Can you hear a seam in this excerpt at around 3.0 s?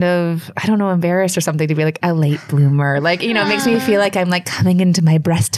no; 0 cuts

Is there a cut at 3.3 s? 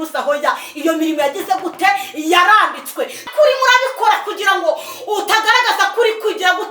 yes; 1 cut; at 3.3 s

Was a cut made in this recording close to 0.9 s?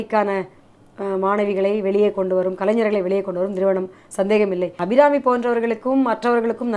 no; 1 cut; at 4.8 s

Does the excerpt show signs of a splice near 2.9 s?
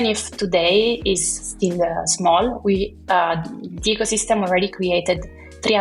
no; 0 cuts

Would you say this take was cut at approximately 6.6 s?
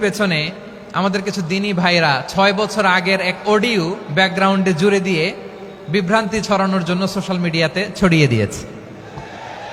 no; 0 cuts

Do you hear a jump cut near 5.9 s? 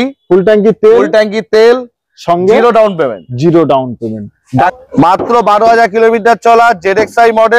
no; 1 cut; at 4.7 s

